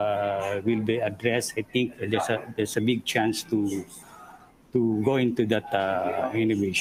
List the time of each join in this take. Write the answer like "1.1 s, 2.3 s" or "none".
none